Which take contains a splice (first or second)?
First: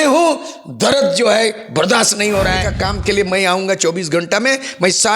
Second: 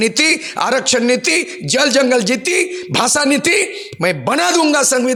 first